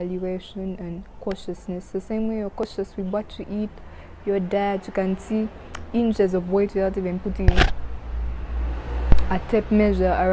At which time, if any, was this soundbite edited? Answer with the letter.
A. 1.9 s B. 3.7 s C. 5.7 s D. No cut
D